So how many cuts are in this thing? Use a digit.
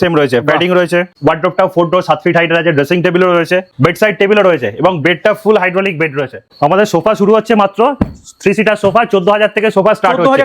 2